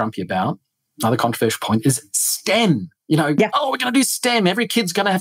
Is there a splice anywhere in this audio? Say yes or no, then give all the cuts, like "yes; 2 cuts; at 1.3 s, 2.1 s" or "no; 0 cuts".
no; 0 cuts